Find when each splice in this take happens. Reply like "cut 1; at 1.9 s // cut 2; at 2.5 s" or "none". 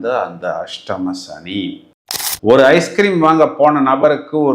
cut 1; at 2.3 s